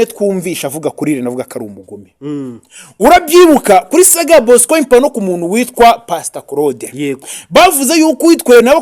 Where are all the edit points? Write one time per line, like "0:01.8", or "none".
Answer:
none